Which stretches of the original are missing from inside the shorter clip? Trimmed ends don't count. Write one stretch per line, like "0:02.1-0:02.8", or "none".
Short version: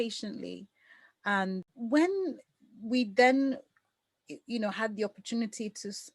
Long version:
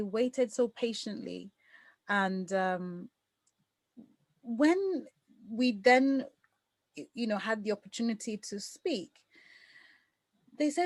0:02.5-0:04.3